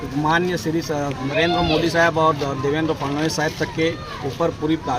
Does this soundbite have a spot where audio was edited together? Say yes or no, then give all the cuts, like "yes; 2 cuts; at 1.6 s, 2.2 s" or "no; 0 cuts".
yes; 1 cut; at 1.2 s